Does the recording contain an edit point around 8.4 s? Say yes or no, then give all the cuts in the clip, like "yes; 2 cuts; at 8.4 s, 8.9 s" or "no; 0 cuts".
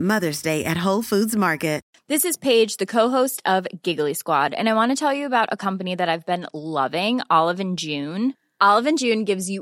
no; 1 cut; at 1.9 s